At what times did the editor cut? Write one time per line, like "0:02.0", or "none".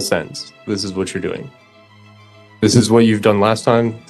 none